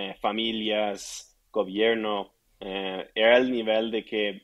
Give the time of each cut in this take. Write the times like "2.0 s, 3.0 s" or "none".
none

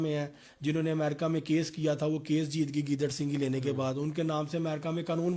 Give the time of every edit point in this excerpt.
none

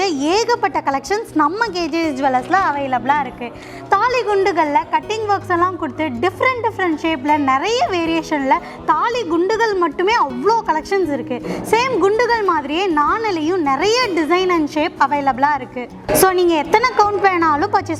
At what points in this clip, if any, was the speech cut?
none

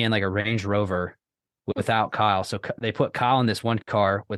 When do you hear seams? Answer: 1.5 s

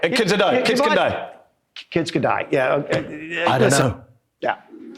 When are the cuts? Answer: 3.4 s

